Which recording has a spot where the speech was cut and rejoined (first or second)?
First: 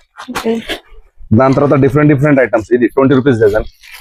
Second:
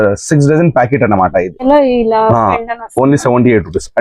second